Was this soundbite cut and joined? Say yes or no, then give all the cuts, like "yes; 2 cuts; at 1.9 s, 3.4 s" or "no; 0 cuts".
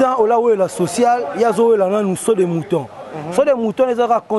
no; 0 cuts